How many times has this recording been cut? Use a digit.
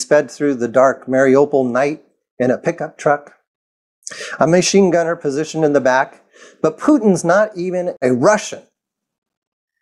1